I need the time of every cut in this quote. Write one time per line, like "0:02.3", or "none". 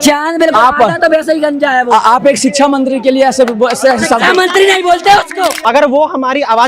0:05.6